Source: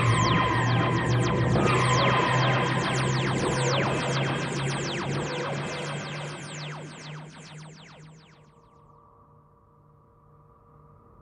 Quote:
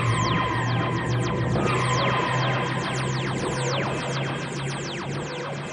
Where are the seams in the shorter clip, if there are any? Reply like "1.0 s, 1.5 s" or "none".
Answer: none